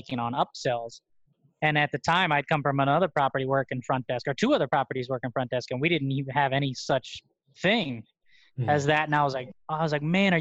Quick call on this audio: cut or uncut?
uncut